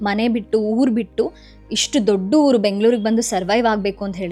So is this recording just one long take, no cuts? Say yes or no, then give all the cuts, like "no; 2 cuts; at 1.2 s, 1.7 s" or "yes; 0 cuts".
yes; 0 cuts